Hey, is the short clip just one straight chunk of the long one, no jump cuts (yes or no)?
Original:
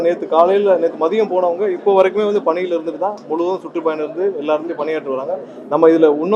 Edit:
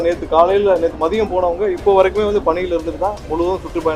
yes